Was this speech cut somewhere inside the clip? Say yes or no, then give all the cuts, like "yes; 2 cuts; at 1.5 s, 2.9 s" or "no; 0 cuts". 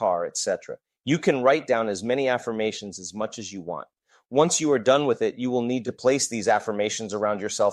no; 0 cuts